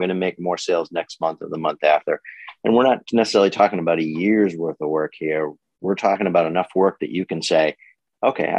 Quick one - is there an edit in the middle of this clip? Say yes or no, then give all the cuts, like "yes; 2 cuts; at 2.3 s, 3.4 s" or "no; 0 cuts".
no; 0 cuts